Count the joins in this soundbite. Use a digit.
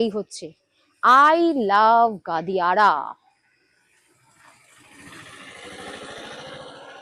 0